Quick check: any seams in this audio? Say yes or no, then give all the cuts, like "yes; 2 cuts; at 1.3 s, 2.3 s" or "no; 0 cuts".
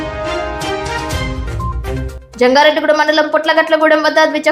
no; 0 cuts